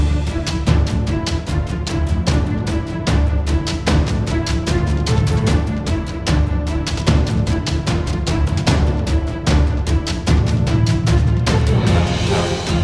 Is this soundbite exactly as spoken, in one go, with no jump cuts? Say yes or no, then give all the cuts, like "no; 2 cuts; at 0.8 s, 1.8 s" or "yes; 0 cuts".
yes; 0 cuts